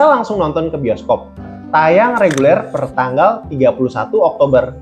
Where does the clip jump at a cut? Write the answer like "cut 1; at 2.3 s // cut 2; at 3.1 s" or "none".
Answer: cut 1; at 1.6 s